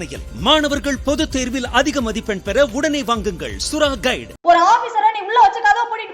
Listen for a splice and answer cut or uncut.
cut